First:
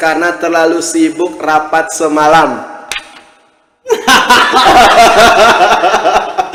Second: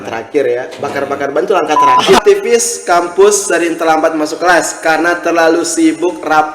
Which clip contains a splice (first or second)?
second